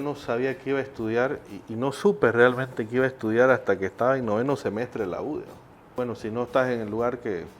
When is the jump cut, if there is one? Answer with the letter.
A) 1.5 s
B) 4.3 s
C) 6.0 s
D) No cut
C